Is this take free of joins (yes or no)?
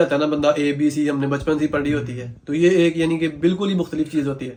yes